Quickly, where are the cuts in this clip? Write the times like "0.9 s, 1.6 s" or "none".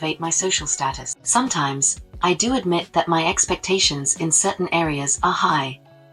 1.0 s